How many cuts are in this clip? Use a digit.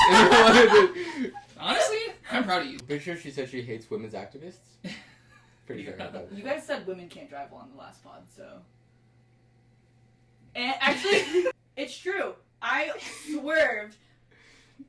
2